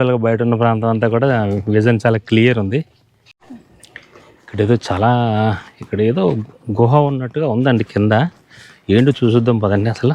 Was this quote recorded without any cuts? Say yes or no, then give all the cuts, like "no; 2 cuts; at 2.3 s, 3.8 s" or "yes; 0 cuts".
no; 1 cut; at 3.3 s